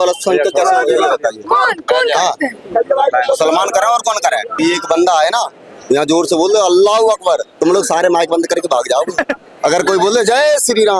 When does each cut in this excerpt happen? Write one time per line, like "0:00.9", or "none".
0:04.6